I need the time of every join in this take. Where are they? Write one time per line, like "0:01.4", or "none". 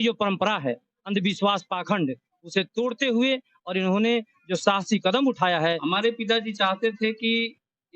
0:05.8